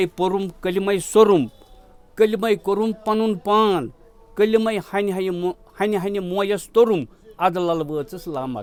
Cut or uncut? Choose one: uncut